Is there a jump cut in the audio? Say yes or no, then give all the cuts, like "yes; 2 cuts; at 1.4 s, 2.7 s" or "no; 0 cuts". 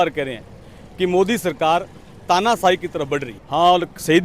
yes; 1 cut; at 3.4 s